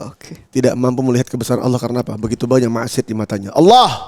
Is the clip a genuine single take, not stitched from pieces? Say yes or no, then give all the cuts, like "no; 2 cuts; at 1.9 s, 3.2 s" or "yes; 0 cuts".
yes; 0 cuts